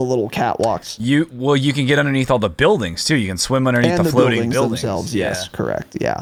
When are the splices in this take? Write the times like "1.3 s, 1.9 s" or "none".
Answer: none